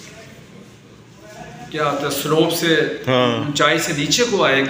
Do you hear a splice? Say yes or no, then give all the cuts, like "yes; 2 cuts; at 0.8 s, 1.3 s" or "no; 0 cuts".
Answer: no; 0 cuts